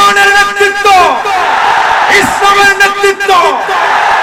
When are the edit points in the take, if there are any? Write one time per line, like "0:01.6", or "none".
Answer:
none